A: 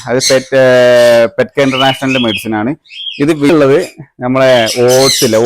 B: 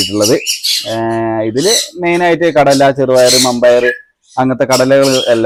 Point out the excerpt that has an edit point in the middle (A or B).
A